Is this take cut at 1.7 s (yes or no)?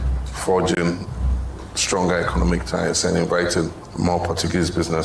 no